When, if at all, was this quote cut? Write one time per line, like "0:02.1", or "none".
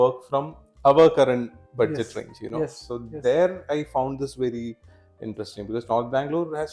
none